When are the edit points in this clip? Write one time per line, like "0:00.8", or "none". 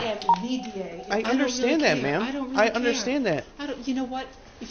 0:01.0